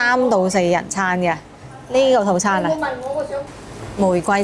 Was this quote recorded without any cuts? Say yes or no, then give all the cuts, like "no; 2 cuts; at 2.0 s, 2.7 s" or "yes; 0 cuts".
no; 1 cut; at 3.4 s